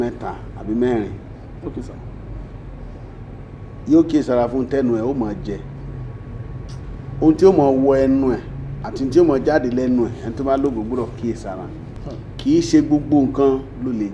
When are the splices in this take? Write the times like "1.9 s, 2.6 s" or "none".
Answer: 11.9 s